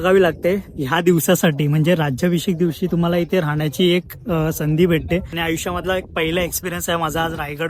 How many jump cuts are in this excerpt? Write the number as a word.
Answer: one